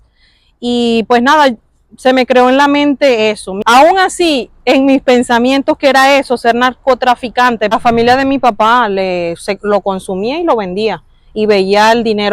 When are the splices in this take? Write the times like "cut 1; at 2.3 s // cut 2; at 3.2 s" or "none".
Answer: cut 1; at 3.5 s // cut 2; at 7.7 s